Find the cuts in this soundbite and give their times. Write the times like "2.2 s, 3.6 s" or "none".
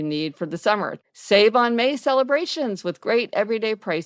1.0 s